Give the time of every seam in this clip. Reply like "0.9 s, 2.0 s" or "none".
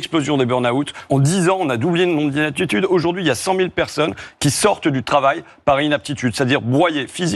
1.1 s